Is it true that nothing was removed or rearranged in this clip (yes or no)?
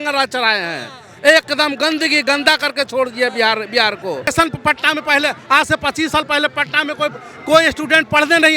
no